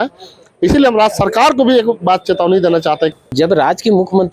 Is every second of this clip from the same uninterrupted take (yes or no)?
no